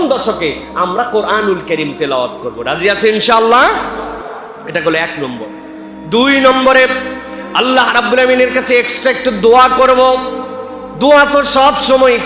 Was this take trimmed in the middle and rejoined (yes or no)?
no